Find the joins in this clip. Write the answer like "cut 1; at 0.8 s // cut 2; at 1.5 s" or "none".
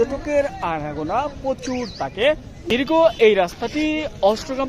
cut 1; at 2.7 s

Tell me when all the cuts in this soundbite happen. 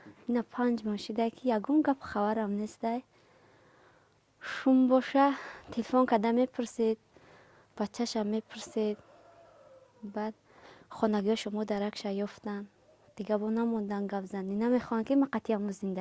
cut 1; at 12.5 s

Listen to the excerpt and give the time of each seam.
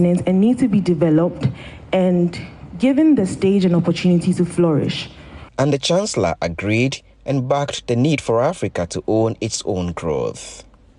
none

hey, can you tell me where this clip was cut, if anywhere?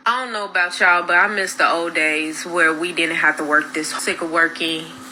cut 1; at 0.7 s // cut 2; at 3.9 s

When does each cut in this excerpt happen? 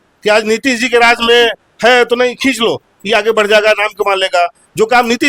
none

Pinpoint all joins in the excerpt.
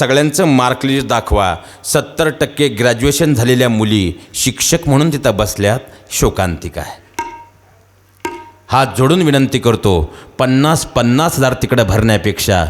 none

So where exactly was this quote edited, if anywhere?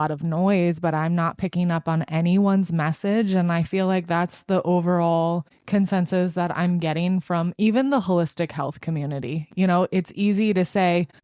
none

